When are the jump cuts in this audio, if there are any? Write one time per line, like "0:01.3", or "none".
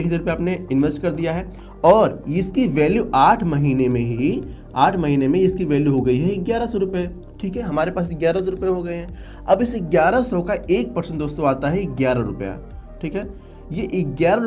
none